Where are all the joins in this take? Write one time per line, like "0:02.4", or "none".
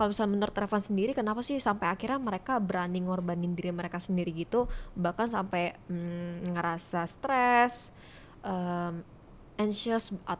none